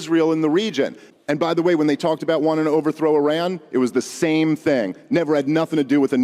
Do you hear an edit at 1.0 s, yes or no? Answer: yes